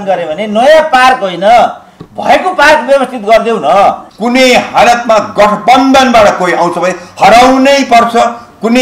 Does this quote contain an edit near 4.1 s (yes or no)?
yes